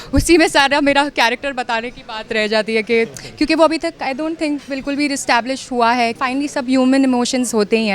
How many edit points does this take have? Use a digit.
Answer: 1